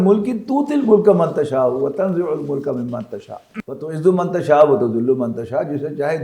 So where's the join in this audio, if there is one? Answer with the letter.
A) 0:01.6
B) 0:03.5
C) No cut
B